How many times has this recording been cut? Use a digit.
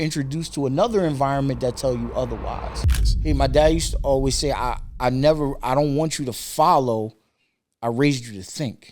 1